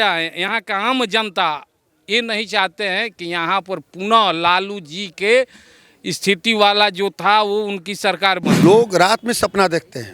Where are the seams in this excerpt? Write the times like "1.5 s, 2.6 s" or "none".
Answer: 8.5 s